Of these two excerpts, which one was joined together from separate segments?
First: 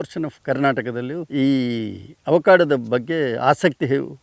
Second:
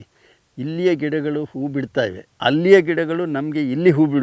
first; 1 cut; at 1.3 s

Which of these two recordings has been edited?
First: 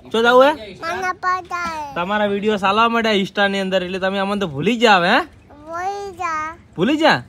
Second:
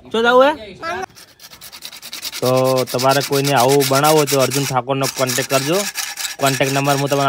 second; 1 cut; at 1.0 s

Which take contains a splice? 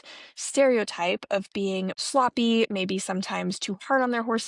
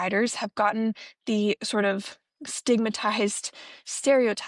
first; 1 cut; at 1.9 s

